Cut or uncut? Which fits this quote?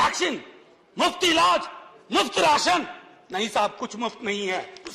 uncut